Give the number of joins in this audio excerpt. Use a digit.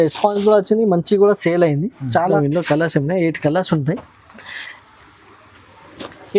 1